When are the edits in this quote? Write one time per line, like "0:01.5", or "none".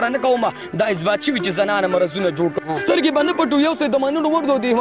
0:02.5